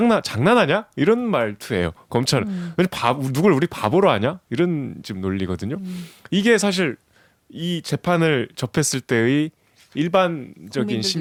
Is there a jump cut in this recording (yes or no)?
no